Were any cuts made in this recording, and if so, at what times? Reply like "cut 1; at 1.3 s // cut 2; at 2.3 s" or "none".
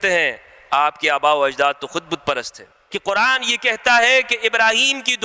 cut 1; at 2.8 s

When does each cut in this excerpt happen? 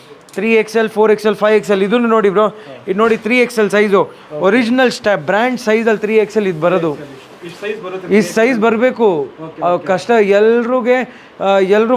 none

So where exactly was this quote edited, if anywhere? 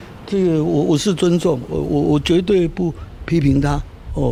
none

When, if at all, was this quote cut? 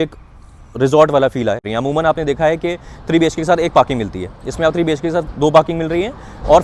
cut 1; at 1.7 s

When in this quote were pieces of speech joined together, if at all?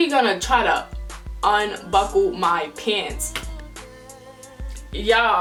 none

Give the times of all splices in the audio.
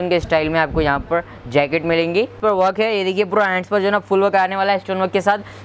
cut 1; at 2.3 s

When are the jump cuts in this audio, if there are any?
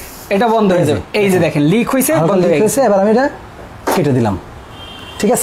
none

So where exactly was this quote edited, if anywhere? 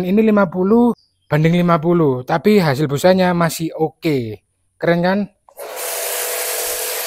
cut 1; at 1.1 s

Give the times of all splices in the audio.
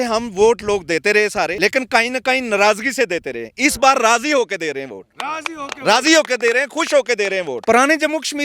cut 1; at 1.5 s // cut 2; at 7.5 s

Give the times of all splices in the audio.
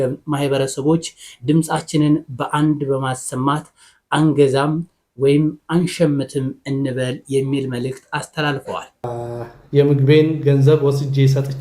cut 1; at 9.1 s

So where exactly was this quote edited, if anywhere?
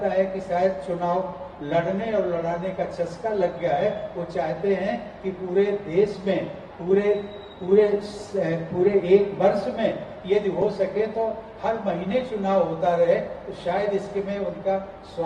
none

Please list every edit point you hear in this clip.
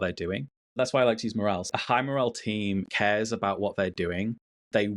cut 1; at 0.7 s // cut 2; at 1.6 s // cut 3; at 2.9 s

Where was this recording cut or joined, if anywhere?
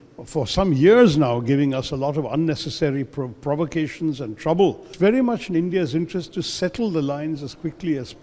cut 1; at 4.9 s

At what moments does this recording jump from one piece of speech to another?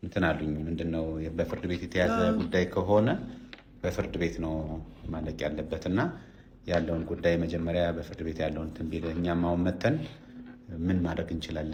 none

